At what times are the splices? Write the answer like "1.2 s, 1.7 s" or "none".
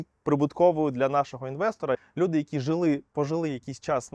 2.0 s